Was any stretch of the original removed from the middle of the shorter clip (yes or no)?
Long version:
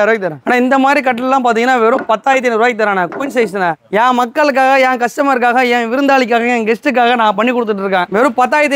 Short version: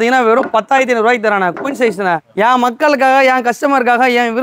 no